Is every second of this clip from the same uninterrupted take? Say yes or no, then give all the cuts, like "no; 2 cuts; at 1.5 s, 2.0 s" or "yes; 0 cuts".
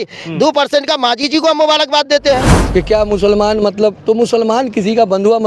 no; 1 cut; at 2.5 s